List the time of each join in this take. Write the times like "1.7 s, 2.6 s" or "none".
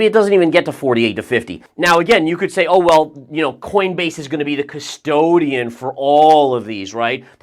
1.6 s